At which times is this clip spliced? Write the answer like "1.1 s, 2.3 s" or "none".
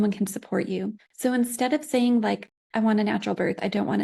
1.0 s, 2.6 s